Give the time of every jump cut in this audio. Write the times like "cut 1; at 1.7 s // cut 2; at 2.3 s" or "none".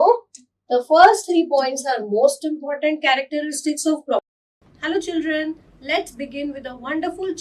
cut 1; at 4.6 s